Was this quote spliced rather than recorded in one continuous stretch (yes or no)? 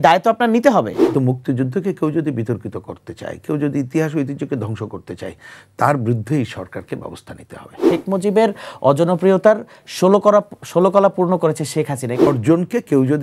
yes